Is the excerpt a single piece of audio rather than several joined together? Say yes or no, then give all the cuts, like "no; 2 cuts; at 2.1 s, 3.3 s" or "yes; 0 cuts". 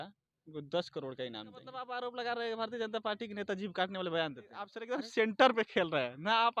no; 2 cuts; at 1.7 s, 4.8 s